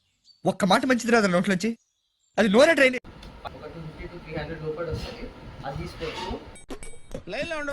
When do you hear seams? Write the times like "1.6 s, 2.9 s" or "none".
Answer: 3.3 s